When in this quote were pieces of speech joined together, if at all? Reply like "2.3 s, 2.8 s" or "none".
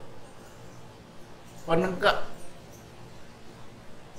none

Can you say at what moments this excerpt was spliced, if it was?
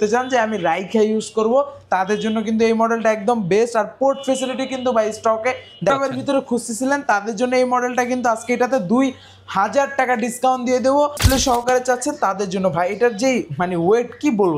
5.9 s, 11.2 s

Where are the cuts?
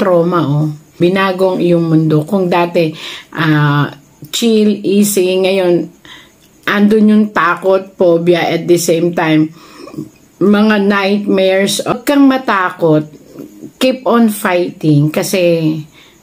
1.0 s, 11.9 s

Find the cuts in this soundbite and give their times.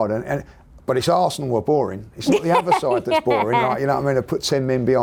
none

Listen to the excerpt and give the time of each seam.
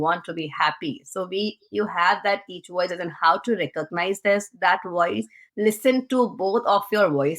5.5 s

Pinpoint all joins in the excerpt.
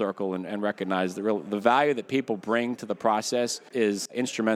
3.6 s

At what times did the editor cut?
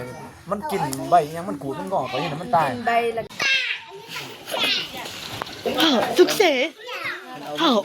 3.3 s

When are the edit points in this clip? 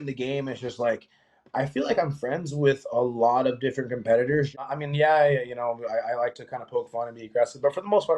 4.6 s

